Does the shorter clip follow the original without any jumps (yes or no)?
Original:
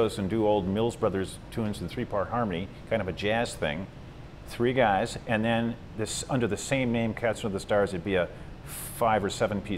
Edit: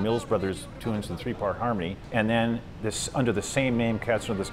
no